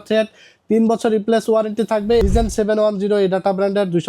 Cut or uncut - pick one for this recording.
cut